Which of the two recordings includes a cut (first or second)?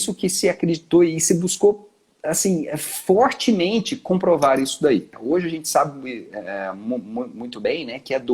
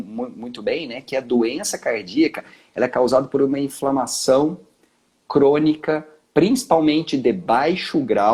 first